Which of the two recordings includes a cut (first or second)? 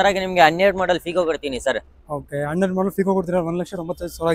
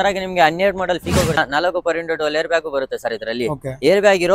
second